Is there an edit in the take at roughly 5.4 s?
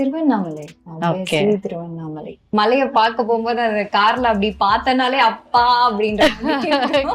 no; 1 cut; at 2.4 s

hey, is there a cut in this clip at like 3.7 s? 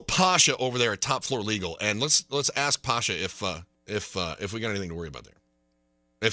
yes; 1 cut; at 3.7 s

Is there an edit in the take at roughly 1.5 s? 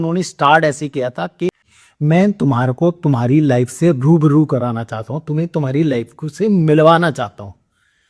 yes; 1 cut; at 1.5 s

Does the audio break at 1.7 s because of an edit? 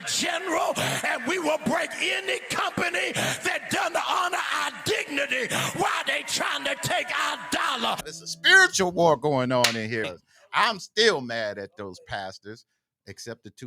no; 2 cuts; at 8.0 s, 10.1 s

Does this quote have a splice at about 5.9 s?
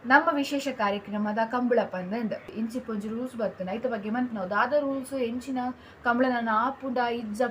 no; 1 cut; at 2.5 s

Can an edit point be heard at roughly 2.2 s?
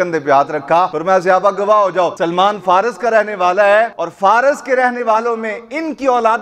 yes; 3 cuts; at 1.0 s, 2.2 s, 4.0 s

